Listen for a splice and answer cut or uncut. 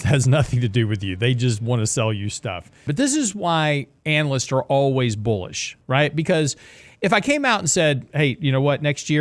cut